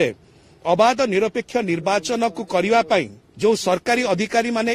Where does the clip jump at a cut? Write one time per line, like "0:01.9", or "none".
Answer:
0:03.2